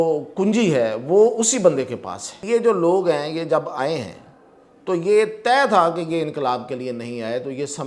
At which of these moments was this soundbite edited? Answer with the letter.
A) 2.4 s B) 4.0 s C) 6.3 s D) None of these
A